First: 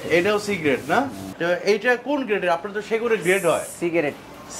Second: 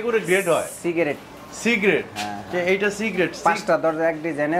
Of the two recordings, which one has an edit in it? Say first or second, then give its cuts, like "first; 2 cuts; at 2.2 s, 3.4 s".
first; 1 cut; at 1.3 s